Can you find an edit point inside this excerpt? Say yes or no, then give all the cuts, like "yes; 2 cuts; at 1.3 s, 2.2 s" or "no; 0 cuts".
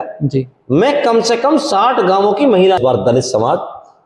yes; 1 cut; at 2.8 s